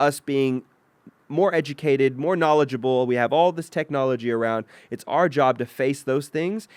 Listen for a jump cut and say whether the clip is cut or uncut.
uncut